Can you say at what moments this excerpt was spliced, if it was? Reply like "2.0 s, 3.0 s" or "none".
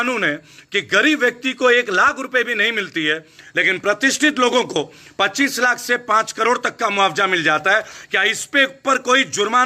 none